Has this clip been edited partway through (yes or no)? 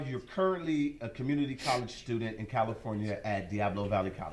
no